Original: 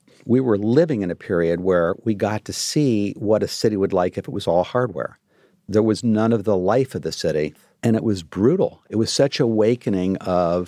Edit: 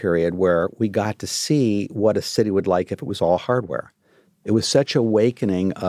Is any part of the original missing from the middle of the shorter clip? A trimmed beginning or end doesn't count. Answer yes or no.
yes